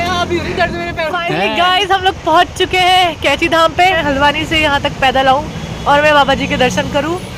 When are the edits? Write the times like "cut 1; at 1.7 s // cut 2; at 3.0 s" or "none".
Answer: cut 1; at 1.2 s // cut 2; at 3.9 s